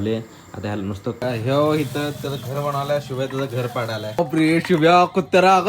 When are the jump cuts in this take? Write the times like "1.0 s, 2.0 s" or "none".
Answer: 1.2 s, 4.2 s